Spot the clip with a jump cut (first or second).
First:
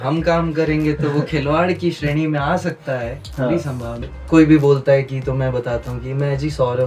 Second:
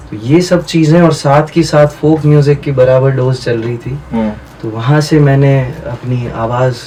first